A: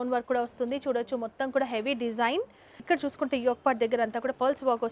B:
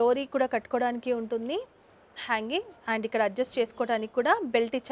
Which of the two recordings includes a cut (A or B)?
A